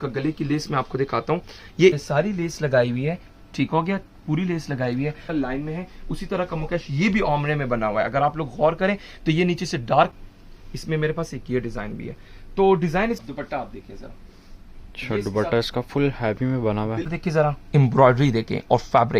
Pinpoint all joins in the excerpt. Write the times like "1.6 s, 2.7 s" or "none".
2.0 s, 5.2 s, 10.1 s, 13.2 s, 17.1 s

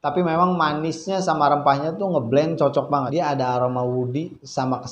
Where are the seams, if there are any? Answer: 2.9 s

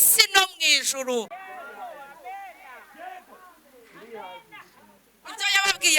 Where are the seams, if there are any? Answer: 1.4 s

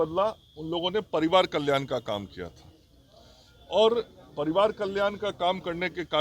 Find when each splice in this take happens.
none

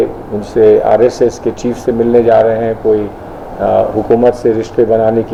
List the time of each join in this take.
none

